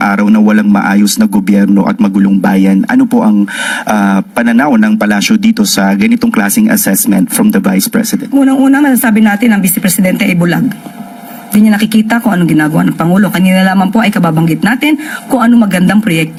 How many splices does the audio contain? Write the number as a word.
zero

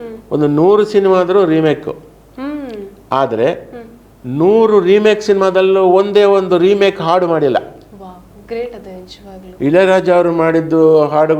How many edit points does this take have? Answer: zero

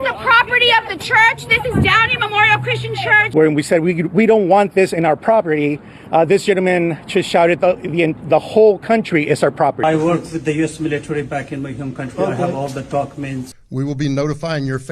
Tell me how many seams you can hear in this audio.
three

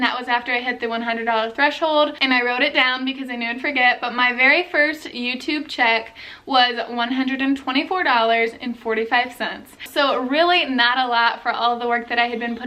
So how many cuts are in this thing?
zero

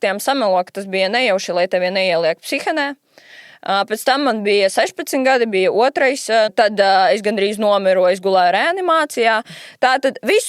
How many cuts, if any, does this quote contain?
one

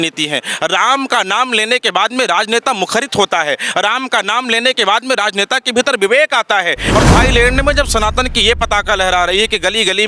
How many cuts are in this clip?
one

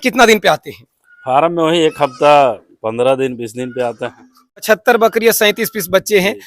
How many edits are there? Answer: one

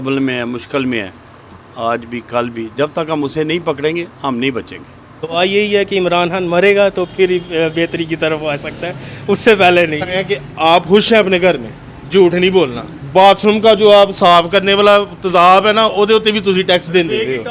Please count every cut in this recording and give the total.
three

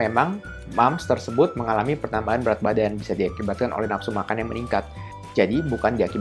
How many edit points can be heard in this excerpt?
zero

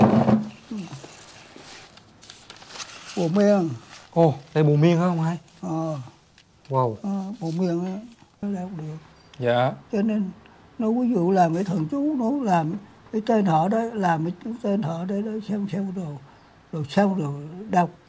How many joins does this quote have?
two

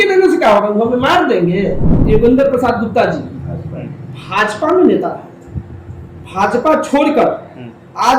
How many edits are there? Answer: one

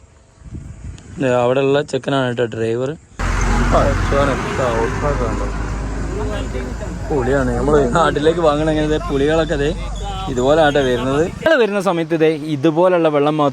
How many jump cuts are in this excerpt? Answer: two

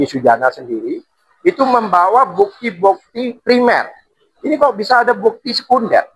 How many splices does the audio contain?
zero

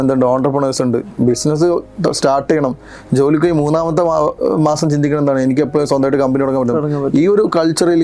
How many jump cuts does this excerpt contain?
zero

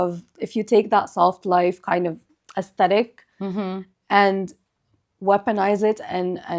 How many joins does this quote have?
zero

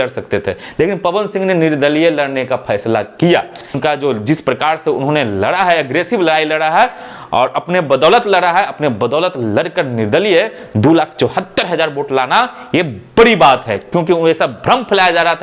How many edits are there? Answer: one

